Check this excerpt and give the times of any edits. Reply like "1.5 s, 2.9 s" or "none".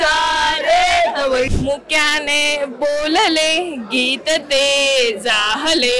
1.5 s